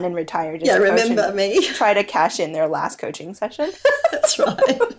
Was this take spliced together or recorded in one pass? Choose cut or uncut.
uncut